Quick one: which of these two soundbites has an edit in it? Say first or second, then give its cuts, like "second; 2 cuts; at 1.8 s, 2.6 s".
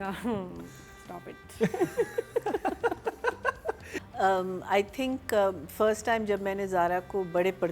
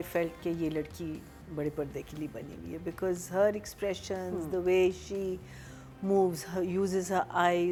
first; 1 cut; at 3.9 s